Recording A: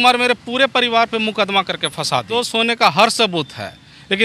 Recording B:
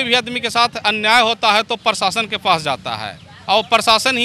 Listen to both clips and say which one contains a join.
A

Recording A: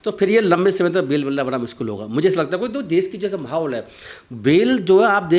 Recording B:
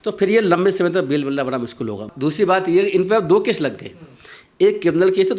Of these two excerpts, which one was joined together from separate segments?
B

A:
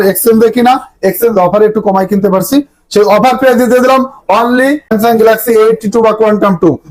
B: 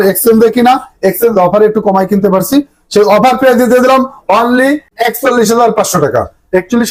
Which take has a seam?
A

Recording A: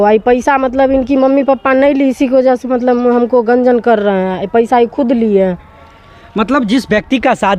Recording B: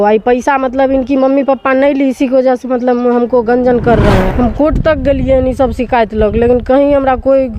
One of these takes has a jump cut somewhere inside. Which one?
B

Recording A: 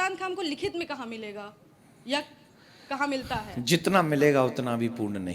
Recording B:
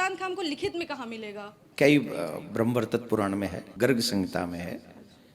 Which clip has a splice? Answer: B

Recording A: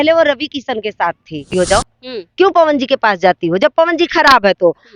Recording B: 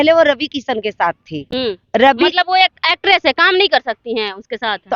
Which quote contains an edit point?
A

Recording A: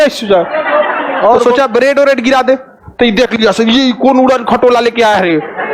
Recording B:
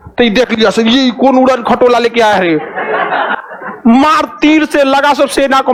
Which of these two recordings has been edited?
A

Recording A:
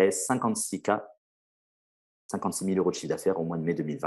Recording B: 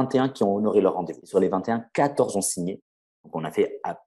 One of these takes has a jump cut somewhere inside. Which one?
B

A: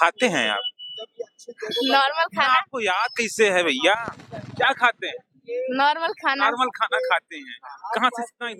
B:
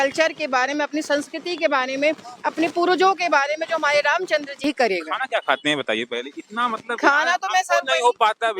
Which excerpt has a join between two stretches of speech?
B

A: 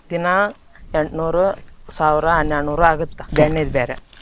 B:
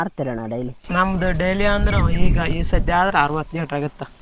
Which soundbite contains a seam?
A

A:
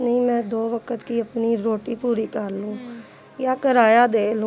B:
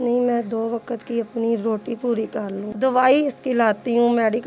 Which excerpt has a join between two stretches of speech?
B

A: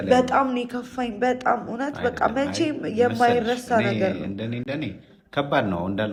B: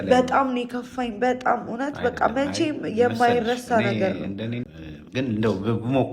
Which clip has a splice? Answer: B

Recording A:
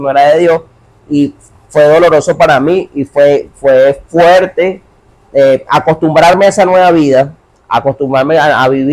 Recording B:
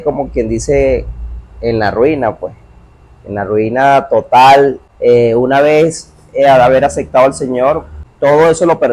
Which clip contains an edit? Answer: B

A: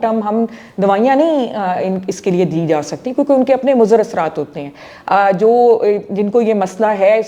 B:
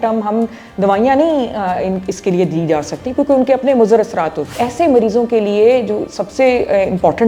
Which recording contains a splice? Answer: B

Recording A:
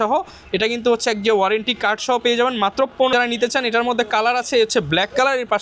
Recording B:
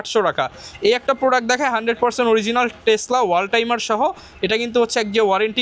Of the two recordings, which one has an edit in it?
A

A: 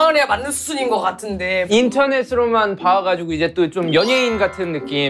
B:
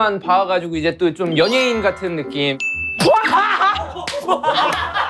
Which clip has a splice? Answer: A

